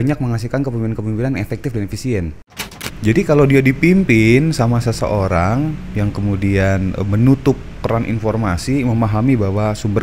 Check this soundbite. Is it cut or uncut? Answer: cut